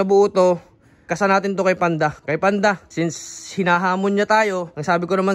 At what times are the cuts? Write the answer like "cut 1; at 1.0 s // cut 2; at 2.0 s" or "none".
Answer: cut 1; at 0.9 s // cut 2; at 2.2 s